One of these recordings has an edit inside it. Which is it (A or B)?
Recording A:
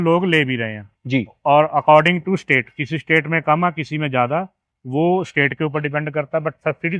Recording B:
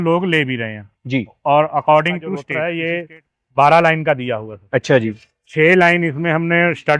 B